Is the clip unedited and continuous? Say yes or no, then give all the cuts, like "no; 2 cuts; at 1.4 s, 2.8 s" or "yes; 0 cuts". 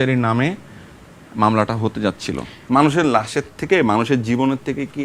no; 1 cut; at 2.5 s